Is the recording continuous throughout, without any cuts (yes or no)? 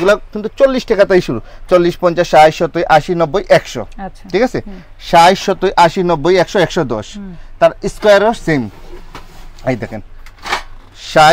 yes